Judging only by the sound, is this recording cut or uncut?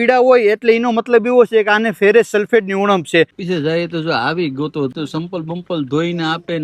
cut